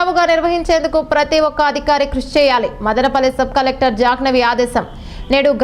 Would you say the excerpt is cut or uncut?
uncut